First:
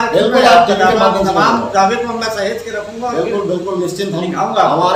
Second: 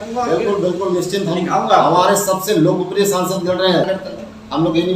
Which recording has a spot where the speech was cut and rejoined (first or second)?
second